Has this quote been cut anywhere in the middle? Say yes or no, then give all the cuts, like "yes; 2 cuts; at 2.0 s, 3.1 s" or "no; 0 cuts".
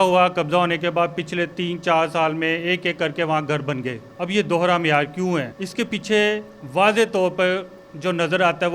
yes; 2 cuts; at 4.0 s, 5.6 s